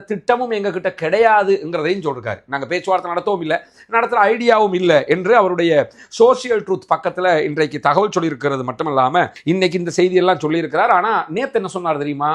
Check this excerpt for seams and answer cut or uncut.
cut